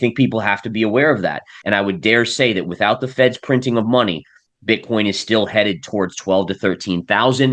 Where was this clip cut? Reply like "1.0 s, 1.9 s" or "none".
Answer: 1.5 s

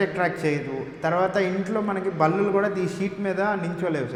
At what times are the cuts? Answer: none

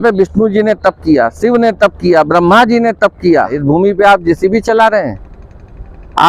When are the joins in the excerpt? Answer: 3.6 s

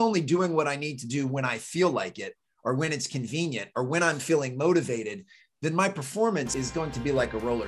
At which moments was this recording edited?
6.5 s

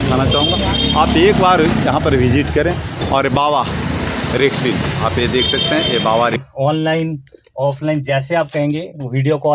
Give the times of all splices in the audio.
6.3 s

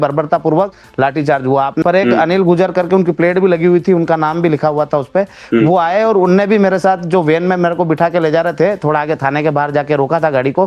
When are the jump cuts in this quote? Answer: 1.8 s

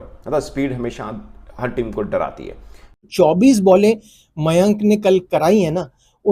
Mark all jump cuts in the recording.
3.0 s

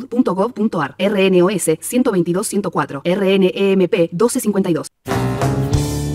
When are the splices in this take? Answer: 5.0 s

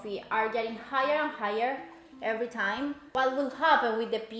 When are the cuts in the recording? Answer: 3.0 s

